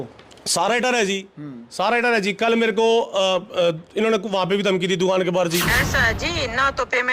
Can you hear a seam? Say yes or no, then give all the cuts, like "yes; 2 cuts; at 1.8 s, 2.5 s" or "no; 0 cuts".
yes; 1 cut; at 5.8 s